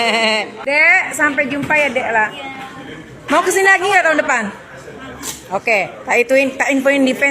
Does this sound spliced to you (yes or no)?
yes